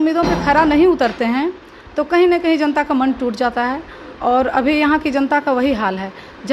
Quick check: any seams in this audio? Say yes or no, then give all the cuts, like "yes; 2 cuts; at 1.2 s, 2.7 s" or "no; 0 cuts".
no; 0 cuts